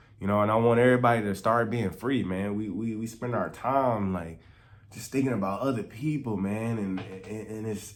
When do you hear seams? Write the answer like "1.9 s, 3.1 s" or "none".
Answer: none